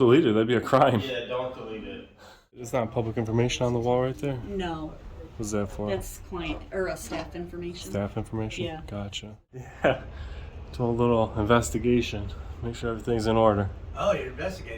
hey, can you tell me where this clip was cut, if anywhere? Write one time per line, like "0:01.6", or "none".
0:02.7
0:09.7